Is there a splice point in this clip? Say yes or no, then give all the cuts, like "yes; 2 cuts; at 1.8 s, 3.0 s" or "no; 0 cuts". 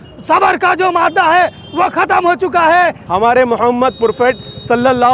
yes; 1 cut; at 3.0 s